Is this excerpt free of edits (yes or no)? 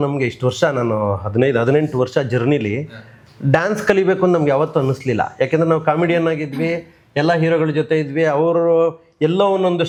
yes